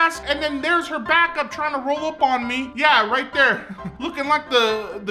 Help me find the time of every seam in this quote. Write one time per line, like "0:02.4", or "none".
0:03.9